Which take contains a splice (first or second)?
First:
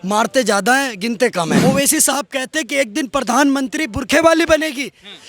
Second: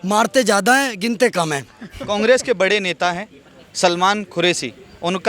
first